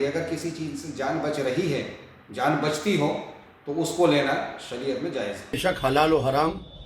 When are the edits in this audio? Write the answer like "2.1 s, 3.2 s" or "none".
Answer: 5.6 s